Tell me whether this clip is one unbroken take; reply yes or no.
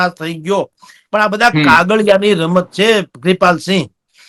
yes